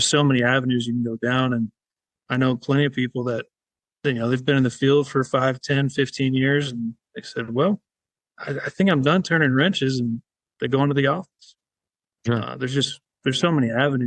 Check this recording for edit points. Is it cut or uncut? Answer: uncut